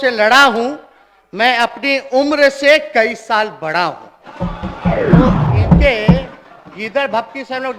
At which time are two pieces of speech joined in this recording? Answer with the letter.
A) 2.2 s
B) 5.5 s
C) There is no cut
B